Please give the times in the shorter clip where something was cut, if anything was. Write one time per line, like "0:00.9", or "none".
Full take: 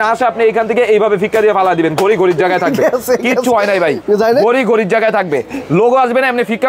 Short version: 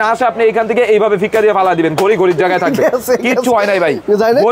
none

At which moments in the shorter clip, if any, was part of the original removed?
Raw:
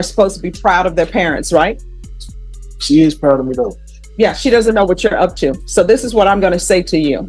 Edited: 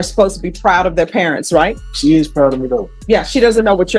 0:01.8
0:02.9

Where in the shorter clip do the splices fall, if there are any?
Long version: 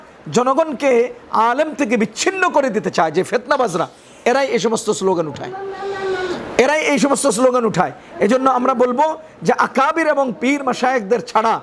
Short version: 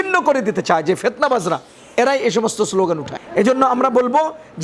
0:03.2

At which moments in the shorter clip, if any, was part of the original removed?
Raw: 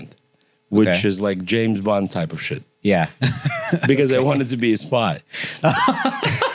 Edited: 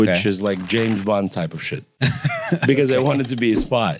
0:01.9

